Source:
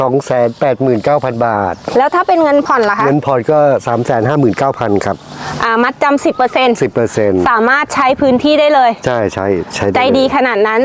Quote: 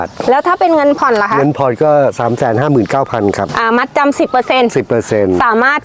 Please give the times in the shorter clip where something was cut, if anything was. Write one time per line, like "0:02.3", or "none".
0:03.5